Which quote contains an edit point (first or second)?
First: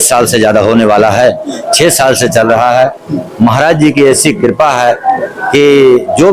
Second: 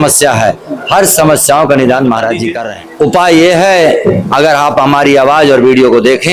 second